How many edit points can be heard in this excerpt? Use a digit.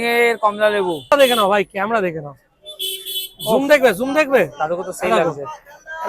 1